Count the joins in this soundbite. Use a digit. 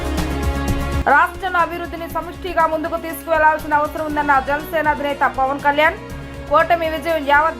1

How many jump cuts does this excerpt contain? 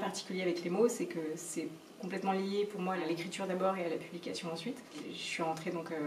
2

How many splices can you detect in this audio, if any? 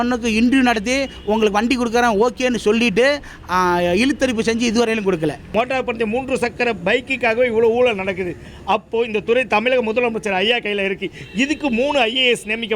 1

